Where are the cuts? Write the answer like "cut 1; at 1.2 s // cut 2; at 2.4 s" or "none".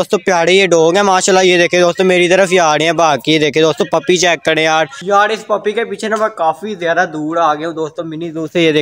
none